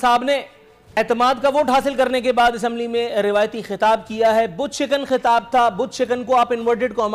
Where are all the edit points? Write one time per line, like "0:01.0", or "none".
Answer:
0:01.0